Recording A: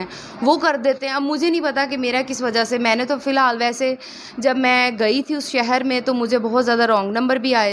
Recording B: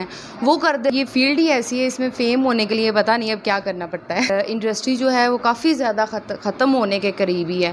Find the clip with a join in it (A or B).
B